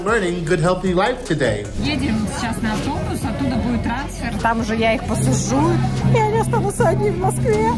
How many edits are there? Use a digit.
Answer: 1